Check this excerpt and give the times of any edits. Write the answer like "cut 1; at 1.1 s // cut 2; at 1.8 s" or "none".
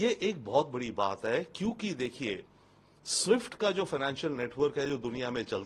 none